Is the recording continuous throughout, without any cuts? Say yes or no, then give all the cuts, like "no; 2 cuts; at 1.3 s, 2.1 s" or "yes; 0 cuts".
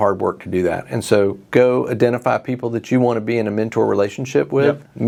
yes; 0 cuts